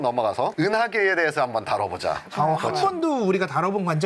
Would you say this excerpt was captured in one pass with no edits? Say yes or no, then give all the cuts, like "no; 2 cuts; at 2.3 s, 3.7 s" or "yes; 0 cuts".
yes; 0 cuts